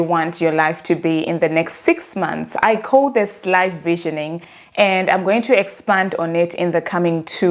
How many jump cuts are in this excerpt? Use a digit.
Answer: 0